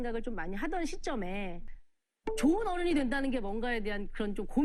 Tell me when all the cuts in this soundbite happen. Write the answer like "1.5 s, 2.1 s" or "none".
1.6 s